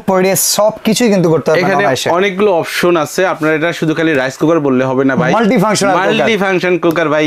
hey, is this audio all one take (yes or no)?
yes